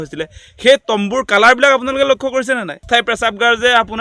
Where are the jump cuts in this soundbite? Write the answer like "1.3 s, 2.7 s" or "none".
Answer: 2.8 s